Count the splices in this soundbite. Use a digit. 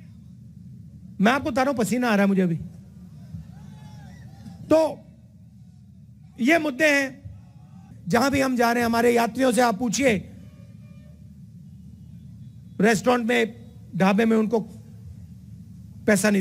1